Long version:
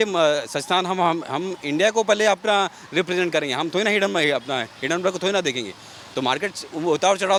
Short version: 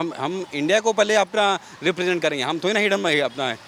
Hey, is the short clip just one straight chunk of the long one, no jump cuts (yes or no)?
yes